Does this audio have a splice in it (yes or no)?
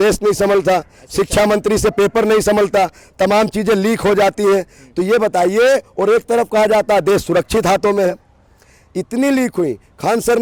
no